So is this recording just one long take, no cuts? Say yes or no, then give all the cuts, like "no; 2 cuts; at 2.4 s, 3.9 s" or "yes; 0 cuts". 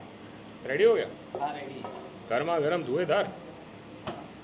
yes; 0 cuts